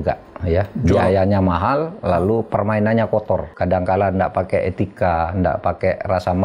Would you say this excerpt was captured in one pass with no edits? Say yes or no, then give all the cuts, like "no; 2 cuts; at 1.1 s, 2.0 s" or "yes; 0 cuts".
no; 1 cut; at 3.5 s